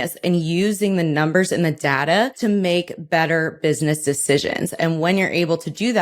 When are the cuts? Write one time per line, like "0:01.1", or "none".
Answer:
0:02.3